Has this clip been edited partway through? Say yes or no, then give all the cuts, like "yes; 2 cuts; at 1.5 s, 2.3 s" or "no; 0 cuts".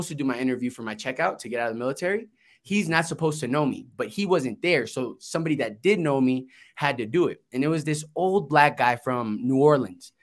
no; 0 cuts